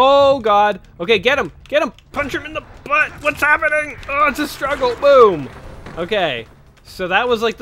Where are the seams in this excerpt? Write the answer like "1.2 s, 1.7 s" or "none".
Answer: none